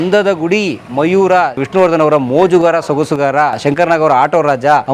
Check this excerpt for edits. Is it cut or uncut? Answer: cut